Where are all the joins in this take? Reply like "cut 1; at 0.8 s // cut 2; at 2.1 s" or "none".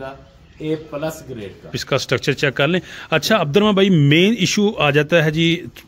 cut 1; at 1.8 s